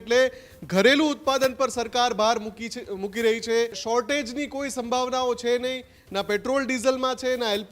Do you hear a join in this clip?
yes; 1 cut; at 3.8 s

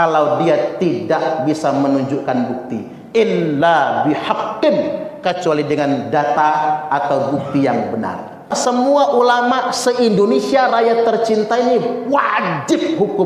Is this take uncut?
no; 1 cut; at 8.5 s

